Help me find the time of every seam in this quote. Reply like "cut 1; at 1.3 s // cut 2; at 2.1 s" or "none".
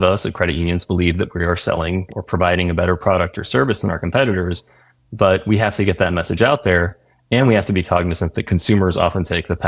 cut 1; at 2.1 s